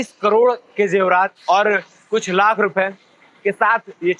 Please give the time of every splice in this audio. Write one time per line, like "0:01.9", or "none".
0:01.4